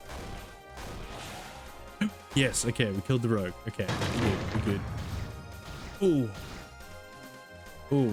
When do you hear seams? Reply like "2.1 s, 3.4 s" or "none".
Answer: none